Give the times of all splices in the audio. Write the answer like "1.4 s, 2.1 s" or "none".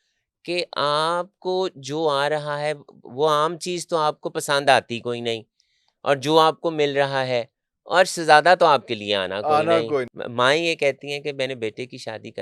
10.1 s